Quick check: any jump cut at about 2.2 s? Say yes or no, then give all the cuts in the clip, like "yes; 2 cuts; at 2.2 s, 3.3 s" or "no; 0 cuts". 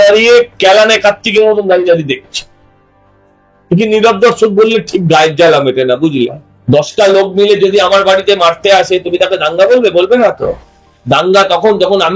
no; 1 cut; at 6.5 s